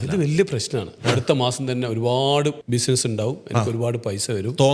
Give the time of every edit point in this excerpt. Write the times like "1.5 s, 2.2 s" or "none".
1.0 s, 2.6 s